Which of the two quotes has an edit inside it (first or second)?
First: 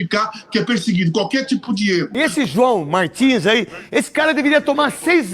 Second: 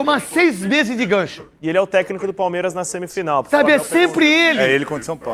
first